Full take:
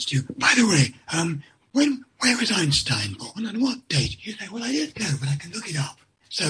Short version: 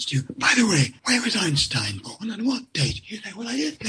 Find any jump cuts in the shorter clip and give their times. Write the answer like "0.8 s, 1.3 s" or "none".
1.0 s